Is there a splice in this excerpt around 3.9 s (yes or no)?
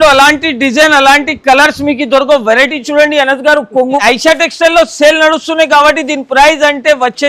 yes